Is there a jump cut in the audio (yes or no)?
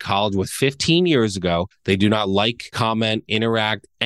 yes